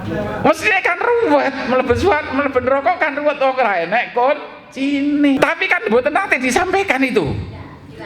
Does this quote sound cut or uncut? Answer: cut